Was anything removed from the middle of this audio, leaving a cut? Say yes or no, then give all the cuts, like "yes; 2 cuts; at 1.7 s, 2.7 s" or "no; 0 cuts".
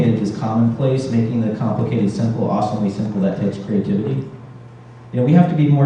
no; 0 cuts